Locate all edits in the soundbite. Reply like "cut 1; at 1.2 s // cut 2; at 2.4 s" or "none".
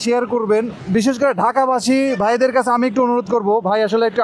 cut 1; at 1.0 s